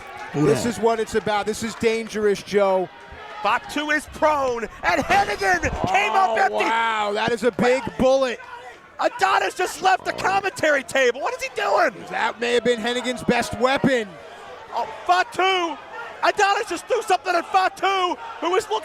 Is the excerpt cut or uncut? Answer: cut